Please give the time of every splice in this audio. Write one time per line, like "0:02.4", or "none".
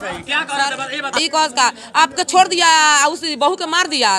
0:01.2